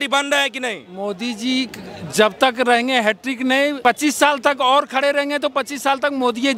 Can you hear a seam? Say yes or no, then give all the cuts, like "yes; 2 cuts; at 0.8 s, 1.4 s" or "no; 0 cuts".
yes; 1 cut; at 3.8 s